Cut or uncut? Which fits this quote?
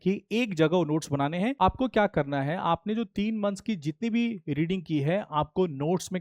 cut